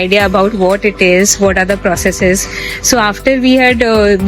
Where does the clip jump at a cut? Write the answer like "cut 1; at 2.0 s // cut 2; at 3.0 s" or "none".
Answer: none